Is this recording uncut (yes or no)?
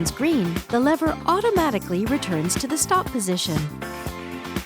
no